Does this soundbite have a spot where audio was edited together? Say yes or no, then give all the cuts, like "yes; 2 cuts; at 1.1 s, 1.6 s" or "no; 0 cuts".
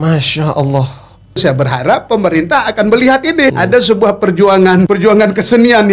yes; 3 cuts; at 1.4 s, 3.6 s, 4.9 s